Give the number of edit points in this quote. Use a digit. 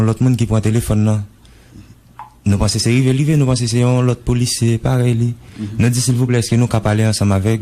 1